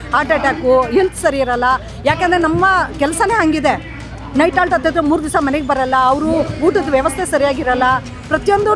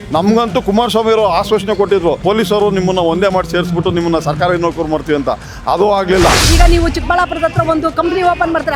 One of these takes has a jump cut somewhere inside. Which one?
second; 2 cuts; at 2.2 s, 6.4 s

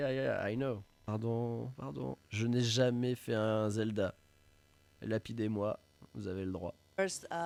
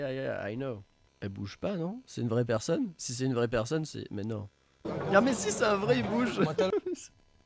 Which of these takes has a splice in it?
second; 2 cuts; at 0.9 s, 4.8 s

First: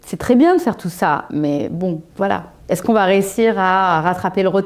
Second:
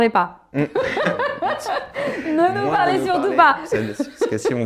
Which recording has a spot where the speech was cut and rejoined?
first; 1 cut; at 2.1 s

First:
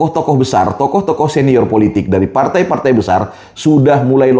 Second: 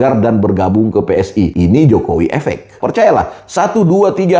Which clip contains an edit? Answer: second; 2 cuts; at 1.5 s, 2.7 s

